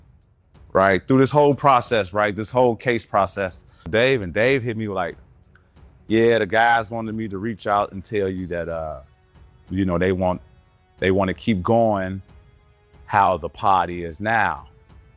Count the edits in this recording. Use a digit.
1